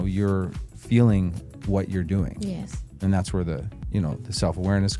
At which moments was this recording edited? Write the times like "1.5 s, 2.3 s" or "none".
none

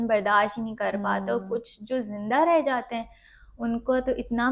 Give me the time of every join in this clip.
none

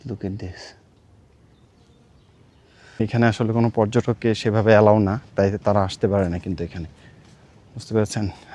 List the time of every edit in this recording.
2.9 s

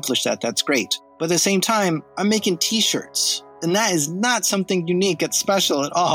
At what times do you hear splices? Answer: 1.0 s, 3.5 s

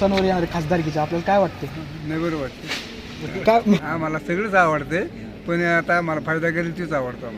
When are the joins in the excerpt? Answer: 3.8 s

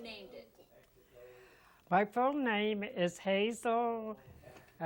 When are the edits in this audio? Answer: none

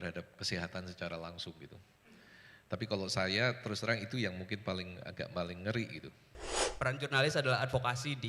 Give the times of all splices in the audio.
6.6 s

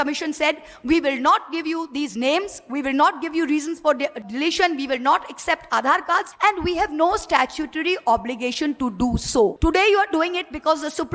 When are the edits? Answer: 4.2 s, 6.3 s, 9.6 s

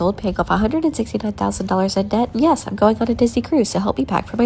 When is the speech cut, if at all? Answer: none

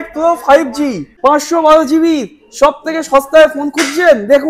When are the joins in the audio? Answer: 1.1 s

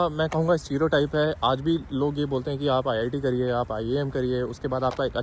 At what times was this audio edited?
none

